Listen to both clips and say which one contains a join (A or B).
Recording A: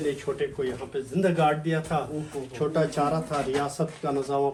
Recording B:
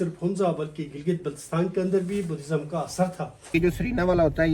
B